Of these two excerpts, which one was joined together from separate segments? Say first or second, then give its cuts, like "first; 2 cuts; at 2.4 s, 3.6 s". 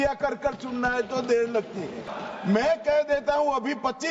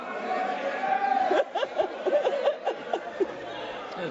first; 1 cut; at 2.1 s